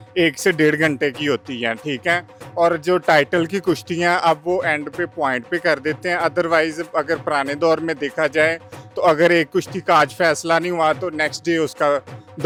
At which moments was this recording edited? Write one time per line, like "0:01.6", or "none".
none